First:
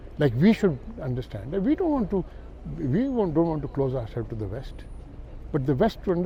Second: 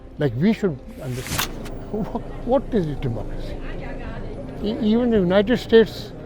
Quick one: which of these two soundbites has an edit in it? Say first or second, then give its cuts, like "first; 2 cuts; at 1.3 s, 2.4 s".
second; 1 cut; at 1.3 s